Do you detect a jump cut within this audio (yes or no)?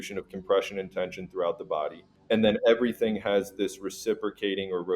yes